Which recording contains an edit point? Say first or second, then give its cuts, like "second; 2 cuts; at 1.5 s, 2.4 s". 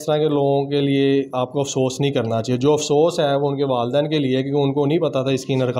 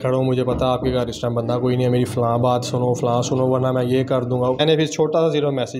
second; 1 cut; at 4.6 s